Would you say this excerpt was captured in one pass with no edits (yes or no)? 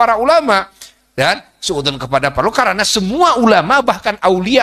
yes